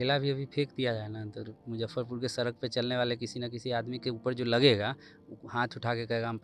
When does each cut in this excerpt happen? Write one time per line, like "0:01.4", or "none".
none